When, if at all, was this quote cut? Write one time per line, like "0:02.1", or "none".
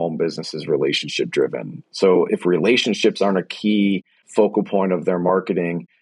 0:02.3
0:04.1